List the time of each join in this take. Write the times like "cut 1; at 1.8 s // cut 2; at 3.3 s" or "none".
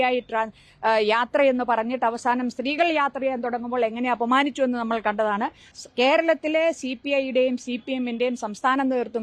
cut 1; at 5.6 s